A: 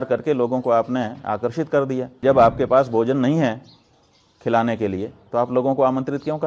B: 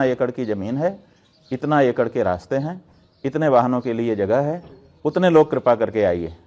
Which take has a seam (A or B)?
A